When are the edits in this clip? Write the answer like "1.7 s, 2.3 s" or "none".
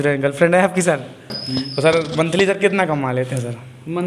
1.3 s